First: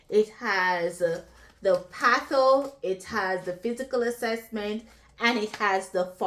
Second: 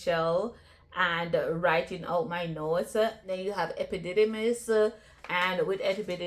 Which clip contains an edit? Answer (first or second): second